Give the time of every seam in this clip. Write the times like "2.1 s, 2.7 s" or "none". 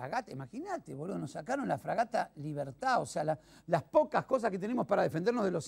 4.3 s